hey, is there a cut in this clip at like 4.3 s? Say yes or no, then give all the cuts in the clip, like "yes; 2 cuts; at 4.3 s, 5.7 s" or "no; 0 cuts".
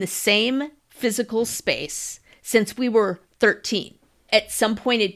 yes; 1 cut; at 4.3 s